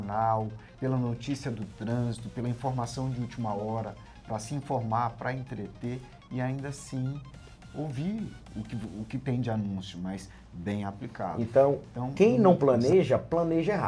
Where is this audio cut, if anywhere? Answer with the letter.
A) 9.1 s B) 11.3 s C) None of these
B